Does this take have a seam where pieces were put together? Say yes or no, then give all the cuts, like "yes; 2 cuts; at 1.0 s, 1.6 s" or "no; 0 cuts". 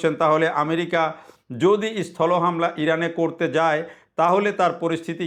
no; 0 cuts